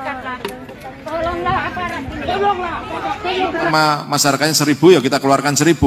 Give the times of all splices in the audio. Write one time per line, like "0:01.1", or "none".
0:03.7